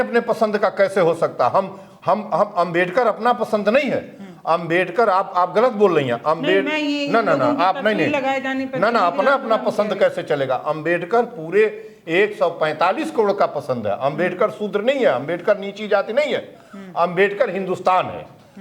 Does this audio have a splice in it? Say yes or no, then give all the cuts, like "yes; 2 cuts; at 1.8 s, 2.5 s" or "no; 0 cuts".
no; 0 cuts